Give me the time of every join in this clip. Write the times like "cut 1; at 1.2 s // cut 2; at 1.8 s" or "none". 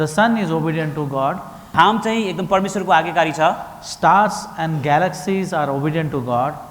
cut 1; at 1.7 s